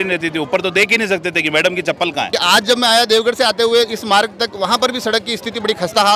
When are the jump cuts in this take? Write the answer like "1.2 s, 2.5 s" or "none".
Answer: 2.4 s

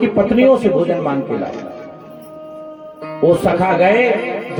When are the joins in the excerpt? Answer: none

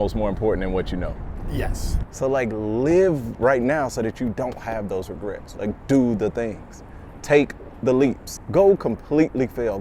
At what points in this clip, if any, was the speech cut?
2.0 s, 8.3 s

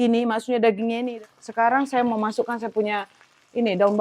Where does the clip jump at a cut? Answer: 1.0 s

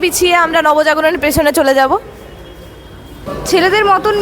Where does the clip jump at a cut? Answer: 2.7 s

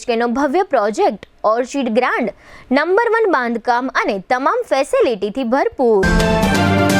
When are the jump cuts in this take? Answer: 6.0 s

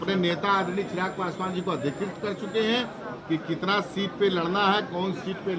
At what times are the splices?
none

